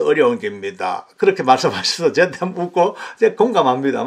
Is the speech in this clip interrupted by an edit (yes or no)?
no